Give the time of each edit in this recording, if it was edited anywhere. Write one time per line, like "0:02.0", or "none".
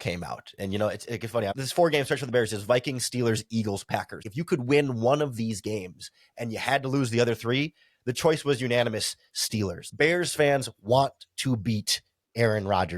0:01.6
0:04.3
0:09.8